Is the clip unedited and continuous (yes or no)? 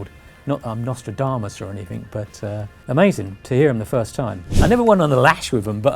no